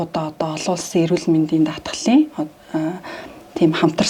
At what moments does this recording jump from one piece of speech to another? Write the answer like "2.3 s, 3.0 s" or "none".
none